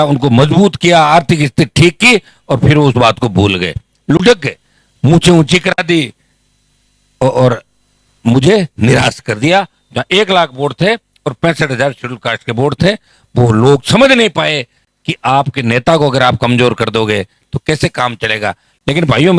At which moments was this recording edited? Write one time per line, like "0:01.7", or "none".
none